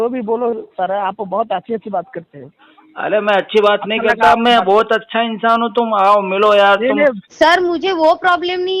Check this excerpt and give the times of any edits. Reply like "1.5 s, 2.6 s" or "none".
7.2 s